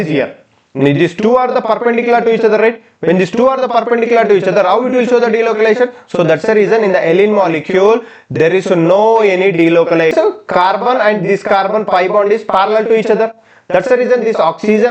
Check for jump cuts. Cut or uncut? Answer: cut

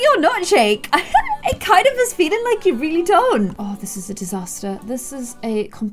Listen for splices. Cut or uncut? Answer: cut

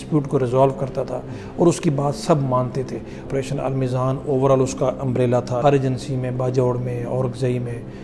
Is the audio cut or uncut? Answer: cut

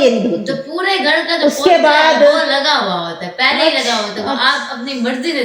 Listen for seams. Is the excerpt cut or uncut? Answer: uncut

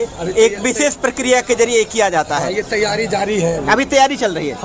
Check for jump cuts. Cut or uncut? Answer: uncut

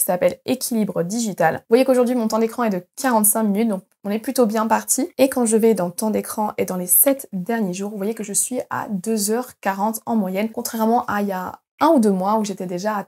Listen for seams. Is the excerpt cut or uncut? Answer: uncut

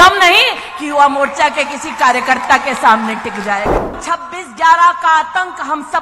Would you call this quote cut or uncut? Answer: cut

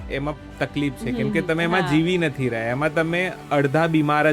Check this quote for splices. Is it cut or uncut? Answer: cut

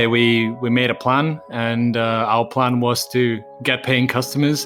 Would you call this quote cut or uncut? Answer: uncut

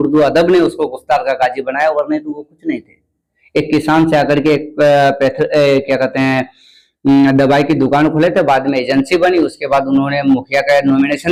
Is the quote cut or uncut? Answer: uncut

